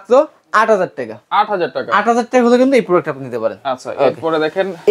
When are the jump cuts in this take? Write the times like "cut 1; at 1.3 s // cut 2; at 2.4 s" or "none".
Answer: none